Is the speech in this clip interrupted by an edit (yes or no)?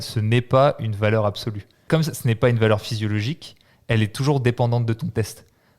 yes